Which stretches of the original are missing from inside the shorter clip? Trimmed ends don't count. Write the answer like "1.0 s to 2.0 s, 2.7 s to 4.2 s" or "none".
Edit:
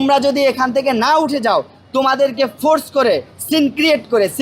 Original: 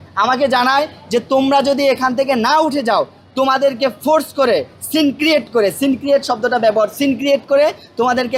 none